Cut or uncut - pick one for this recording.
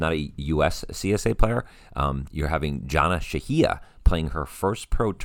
uncut